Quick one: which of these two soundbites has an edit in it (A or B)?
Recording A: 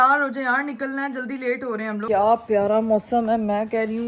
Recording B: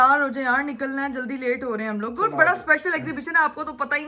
A